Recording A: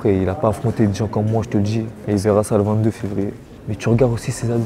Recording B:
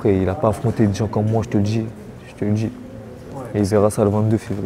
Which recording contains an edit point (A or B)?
A